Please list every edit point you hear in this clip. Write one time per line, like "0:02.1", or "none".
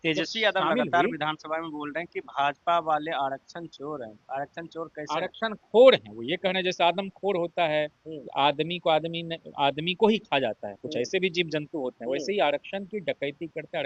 none